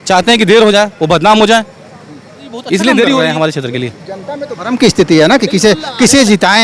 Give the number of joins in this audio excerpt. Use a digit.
1